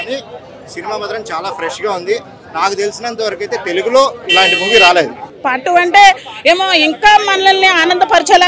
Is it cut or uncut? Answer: cut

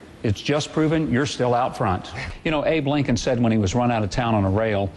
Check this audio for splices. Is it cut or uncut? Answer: cut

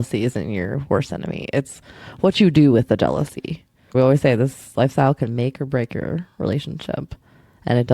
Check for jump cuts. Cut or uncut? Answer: cut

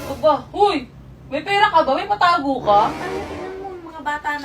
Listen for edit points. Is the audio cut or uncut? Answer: cut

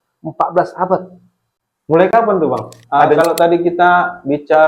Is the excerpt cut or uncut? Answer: cut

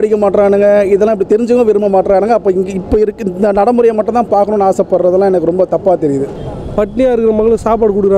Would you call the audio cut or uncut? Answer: cut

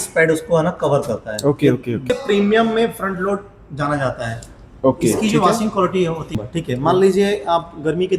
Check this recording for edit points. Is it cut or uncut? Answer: cut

